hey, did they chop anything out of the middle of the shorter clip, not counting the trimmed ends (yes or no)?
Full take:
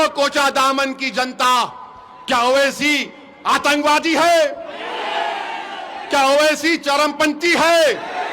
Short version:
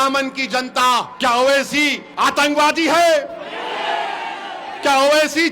yes